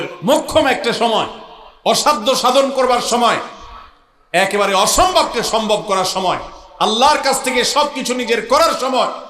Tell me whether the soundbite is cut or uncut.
uncut